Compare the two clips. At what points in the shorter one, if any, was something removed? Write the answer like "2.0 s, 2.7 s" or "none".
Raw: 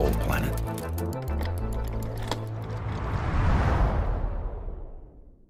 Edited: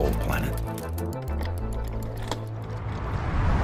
none